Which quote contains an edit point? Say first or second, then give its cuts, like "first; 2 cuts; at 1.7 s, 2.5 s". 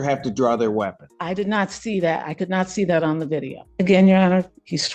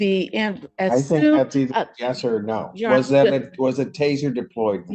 first; 2 cuts; at 1.1 s, 3.6 s